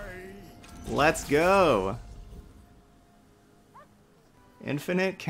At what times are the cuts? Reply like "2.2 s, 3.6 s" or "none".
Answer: 4.4 s